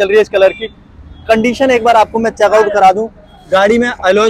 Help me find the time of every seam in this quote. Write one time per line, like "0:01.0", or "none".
none